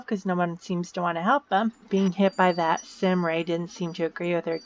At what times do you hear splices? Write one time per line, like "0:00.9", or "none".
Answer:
0:01.8